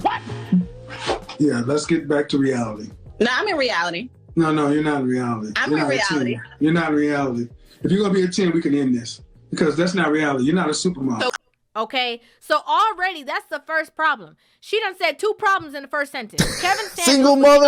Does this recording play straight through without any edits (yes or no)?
yes